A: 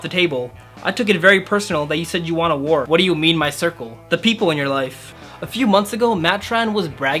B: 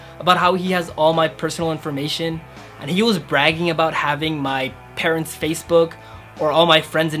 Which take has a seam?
A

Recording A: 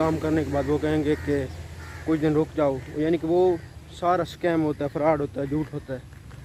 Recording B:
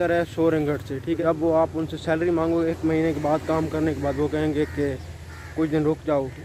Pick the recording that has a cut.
B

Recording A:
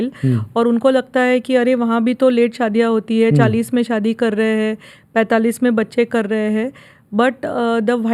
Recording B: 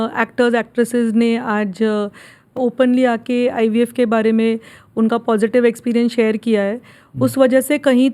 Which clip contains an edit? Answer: B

